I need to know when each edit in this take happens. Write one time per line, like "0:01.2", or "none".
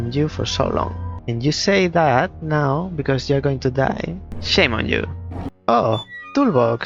0:04.4
0:05.5

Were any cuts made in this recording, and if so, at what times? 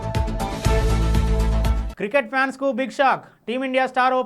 0:01.8

